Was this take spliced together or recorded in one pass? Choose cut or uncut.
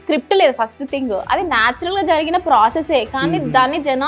uncut